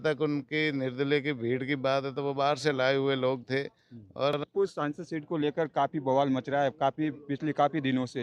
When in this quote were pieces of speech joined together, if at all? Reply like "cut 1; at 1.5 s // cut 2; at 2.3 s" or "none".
cut 1; at 4.4 s